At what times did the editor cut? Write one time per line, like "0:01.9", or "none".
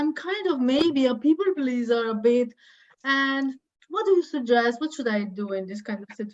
none